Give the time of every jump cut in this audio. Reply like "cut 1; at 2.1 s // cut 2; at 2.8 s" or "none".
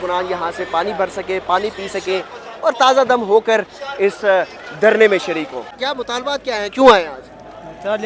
cut 1; at 5.6 s